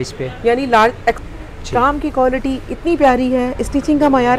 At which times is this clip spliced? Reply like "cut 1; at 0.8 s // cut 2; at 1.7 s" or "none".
cut 1; at 1.2 s